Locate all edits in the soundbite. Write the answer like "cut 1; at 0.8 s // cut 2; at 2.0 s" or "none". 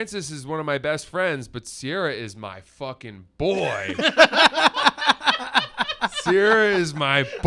none